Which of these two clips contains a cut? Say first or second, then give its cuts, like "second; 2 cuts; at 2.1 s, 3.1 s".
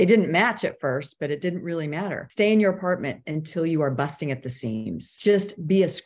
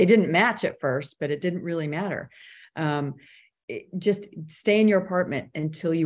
first; 2 cuts; at 2.2 s, 5.1 s